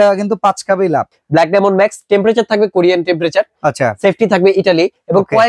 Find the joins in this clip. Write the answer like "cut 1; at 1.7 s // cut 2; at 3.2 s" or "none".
cut 1; at 1.2 s